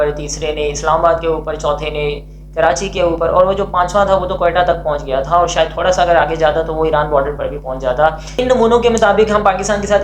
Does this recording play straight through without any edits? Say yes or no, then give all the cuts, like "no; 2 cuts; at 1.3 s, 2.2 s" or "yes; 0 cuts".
no; 1 cut; at 8.2 s